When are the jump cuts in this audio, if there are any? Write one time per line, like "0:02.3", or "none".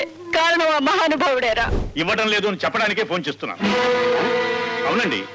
0:01.8